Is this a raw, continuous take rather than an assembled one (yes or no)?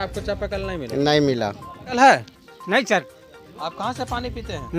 no